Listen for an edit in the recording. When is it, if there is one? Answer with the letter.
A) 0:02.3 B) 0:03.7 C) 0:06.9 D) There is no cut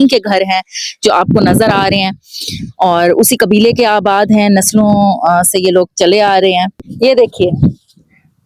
C